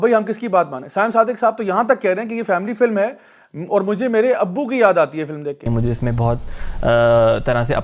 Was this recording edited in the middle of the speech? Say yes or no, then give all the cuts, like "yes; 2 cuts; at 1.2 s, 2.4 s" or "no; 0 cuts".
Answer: yes; 1 cut; at 5.7 s